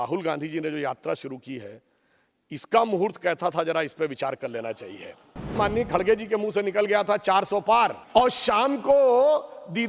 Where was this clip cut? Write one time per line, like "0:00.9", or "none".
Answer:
0:05.5
0:08.0